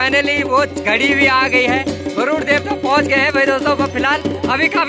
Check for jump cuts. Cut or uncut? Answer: uncut